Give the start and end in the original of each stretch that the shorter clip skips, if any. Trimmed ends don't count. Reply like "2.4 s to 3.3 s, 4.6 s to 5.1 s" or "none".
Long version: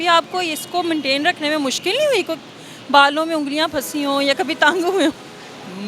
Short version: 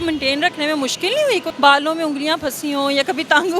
2.3 s to 2.8 s